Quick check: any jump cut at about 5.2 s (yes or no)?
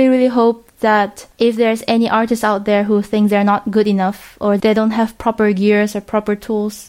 no